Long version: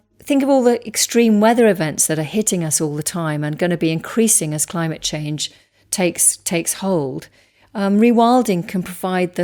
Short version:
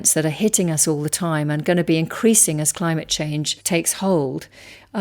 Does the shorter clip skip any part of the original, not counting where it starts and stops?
yes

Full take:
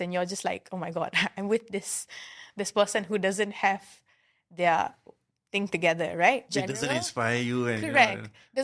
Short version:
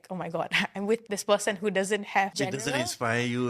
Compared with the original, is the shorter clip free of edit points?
no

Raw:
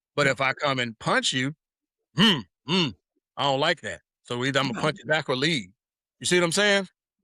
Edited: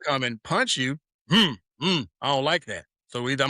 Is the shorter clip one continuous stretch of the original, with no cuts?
no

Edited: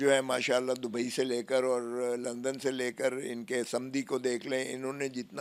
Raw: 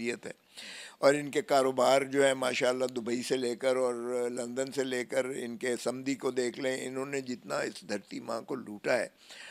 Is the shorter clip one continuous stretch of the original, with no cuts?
yes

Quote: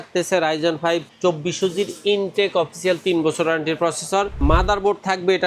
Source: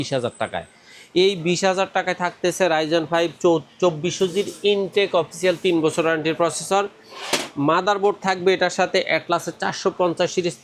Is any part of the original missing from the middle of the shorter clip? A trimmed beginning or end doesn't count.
yes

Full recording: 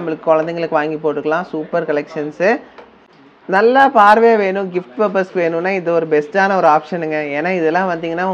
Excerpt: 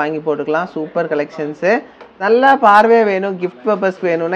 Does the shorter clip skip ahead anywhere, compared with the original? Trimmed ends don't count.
yes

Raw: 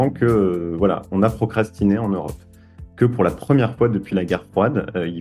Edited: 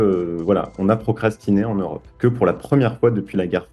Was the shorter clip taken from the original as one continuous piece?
no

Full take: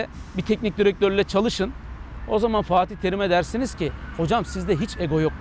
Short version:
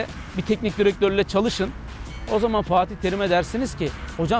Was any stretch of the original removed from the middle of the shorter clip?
no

